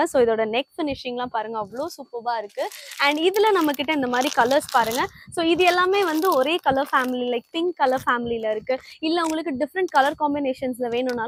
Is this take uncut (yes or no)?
yes